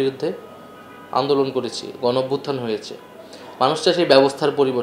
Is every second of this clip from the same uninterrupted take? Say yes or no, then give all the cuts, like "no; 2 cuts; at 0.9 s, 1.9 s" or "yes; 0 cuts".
yes; 0 cuts